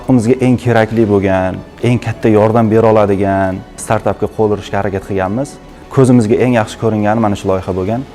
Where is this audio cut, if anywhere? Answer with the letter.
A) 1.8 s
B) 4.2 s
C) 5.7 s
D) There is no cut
A